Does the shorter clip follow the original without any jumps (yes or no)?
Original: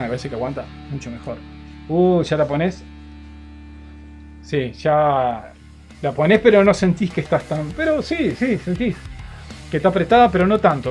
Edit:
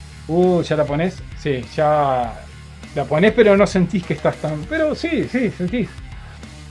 no